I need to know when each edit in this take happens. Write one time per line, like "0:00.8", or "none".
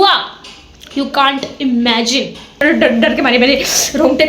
0:02.6

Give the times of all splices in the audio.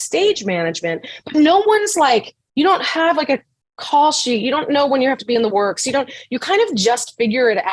none

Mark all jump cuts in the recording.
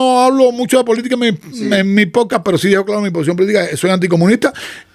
none

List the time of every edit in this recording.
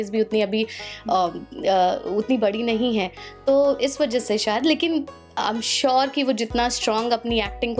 none

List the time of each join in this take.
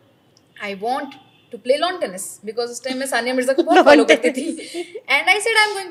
none

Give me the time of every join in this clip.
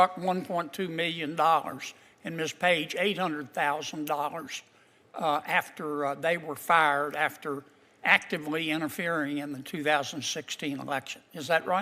none

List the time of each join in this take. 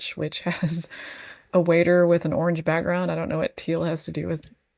none

